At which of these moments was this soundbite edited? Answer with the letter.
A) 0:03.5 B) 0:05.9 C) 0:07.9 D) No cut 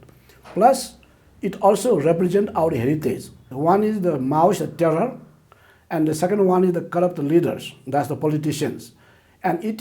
A